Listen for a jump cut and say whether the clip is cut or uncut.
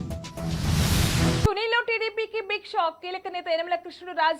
cut